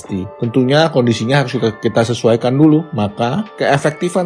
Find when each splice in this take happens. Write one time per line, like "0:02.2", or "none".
0:02.9